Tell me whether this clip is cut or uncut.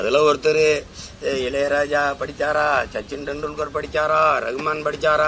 uncut